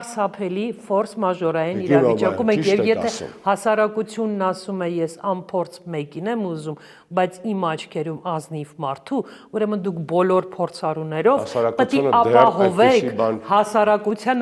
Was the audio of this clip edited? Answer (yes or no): no